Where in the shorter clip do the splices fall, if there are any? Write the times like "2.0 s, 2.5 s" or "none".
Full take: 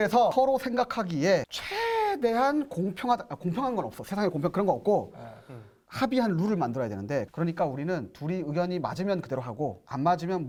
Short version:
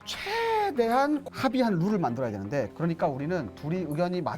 1.3 s